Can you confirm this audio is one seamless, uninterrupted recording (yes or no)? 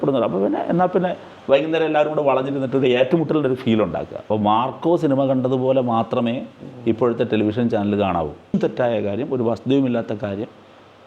no